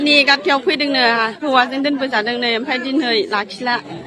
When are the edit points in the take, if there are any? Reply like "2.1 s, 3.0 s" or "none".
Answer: none